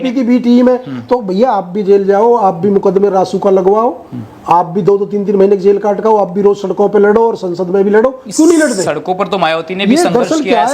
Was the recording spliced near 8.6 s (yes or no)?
no